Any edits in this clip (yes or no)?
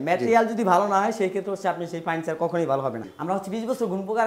yes